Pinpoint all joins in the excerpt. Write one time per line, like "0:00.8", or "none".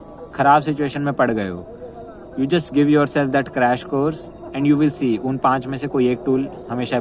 none